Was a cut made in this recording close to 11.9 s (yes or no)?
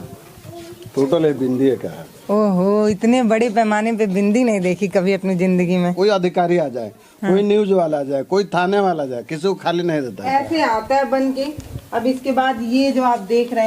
no